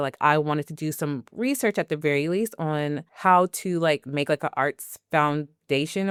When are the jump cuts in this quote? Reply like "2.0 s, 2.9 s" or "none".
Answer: none